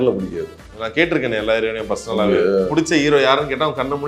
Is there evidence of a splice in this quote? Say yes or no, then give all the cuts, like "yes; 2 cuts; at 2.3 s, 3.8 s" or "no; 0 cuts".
yes; 1 cut; at 2.7 s